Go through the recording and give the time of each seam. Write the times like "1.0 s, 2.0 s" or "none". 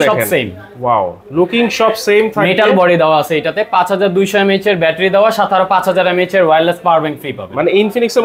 none